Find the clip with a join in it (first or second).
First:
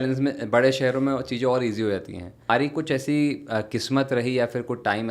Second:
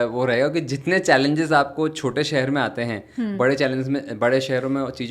first